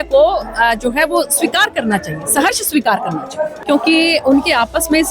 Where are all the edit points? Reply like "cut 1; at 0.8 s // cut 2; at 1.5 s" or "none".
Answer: cut 1; at 3.6 s